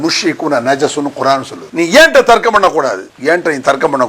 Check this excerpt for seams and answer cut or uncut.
cut